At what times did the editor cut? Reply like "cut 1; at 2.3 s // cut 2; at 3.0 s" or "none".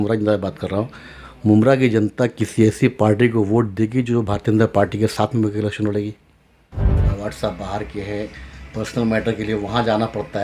cut 1; at 7.0 s

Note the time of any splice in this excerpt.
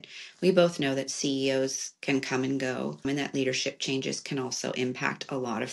cut 1; at 3.0 s

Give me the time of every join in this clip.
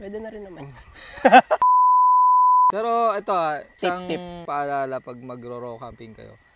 cut 1; at 2.7 s // cut 2; at 4.1 s

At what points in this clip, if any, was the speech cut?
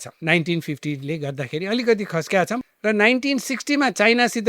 cut 1; at 2.7 s

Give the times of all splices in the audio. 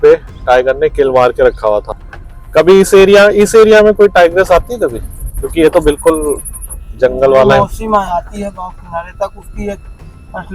cut 1; at 1.9 s

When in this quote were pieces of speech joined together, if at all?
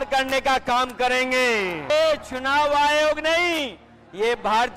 cut 1; at 1.9 s

